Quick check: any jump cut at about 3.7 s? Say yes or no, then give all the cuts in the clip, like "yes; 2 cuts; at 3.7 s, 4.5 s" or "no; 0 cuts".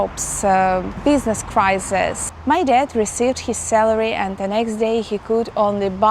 no; 2 cuts; at 0.9 s, 2.3 s